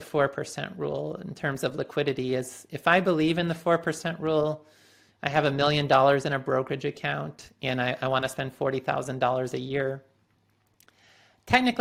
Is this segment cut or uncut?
uncut